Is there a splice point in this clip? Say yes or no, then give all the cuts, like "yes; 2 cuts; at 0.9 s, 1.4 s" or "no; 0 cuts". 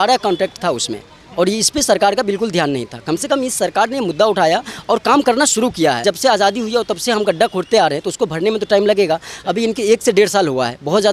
yes; 1 cut; at 6.0 s